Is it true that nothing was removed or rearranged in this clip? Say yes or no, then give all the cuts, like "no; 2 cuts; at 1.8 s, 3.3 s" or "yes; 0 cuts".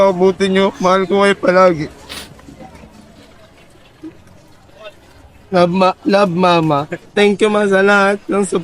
no; 1 cut; at 7.0 s